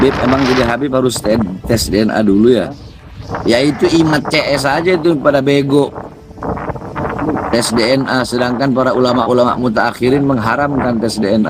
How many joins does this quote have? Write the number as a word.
zero